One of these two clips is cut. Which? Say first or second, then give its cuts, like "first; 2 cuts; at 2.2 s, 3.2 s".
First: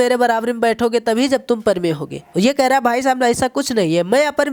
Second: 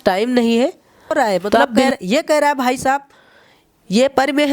second; 1 cut; at 1.9 s